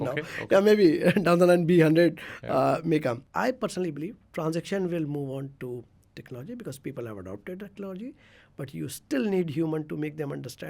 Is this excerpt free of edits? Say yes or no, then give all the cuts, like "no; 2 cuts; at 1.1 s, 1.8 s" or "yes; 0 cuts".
no; 1 cut; at 3.3 s